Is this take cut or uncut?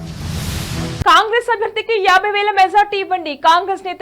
cut